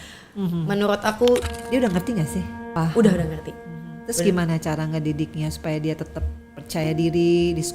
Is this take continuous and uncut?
no; 2 cuts; at 1.5 s, 2.7 s

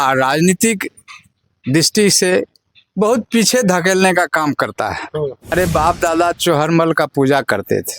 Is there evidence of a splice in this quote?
yes; 1 cut; at 5.5 s

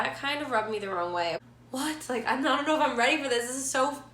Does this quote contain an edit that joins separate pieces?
yes; 1 cut; at 1.3 s

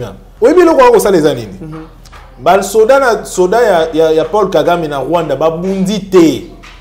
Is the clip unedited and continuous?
yes; 0 cuts

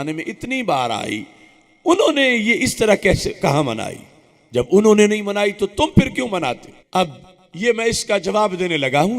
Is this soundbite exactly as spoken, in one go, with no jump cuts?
no; 1 cut; at 6.7 s

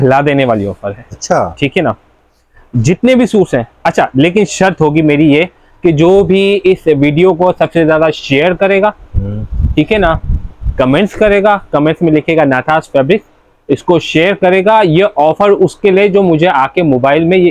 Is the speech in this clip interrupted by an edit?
no; 0 cuts

